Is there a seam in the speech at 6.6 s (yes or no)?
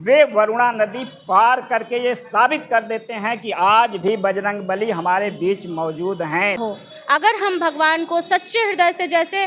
yes